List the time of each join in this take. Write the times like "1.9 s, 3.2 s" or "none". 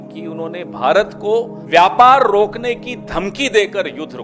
1.6 s